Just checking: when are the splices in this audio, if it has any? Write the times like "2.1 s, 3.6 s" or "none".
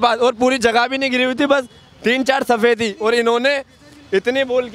none

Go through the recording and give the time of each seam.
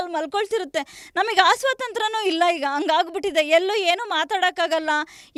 none

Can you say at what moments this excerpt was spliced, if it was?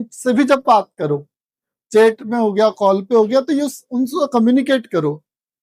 none

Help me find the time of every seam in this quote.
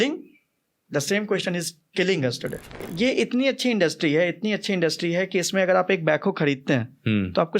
2.9 s

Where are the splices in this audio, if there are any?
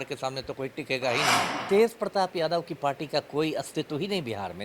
1.5 s

